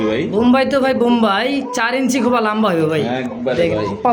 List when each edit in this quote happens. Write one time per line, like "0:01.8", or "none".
none